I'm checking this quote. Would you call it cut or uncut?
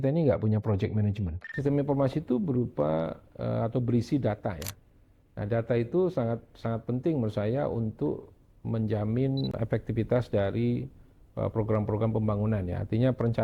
cut